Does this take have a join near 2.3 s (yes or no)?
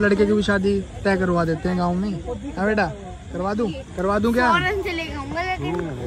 no